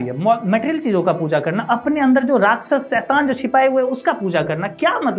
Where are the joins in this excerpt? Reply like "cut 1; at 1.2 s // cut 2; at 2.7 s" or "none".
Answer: none